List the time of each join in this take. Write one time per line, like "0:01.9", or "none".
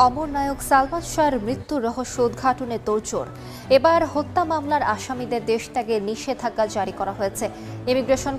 none